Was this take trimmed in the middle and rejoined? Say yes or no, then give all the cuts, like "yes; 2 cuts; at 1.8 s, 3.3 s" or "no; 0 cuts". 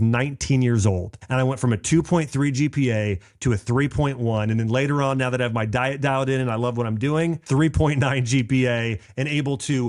yes; 2 cuts; at 1.1 s, 7.4 s